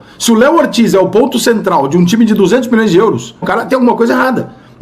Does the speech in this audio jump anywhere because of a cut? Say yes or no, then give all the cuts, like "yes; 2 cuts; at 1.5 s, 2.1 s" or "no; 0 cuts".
yes; 1 cut; at 3.5 s